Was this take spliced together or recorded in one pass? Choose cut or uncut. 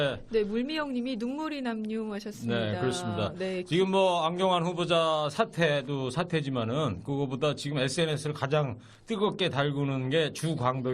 cut